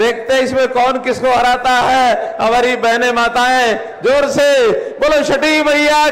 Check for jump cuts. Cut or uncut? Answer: uncut